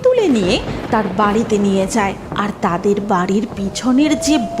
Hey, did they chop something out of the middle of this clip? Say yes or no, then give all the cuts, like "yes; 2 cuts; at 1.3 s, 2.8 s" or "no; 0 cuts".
yes; 1 cut; at 2.3 s